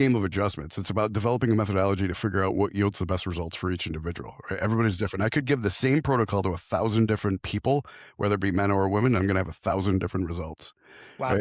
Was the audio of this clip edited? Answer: no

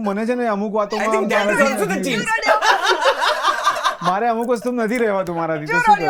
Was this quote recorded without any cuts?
yes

